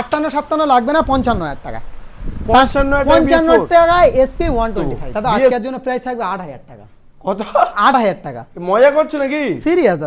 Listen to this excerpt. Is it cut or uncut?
cut